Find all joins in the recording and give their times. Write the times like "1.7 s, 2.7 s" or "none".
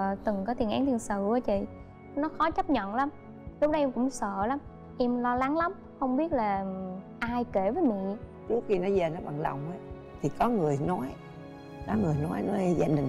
8.3 s